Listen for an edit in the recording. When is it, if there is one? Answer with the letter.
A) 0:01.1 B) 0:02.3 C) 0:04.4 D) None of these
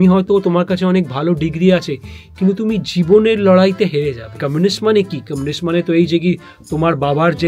C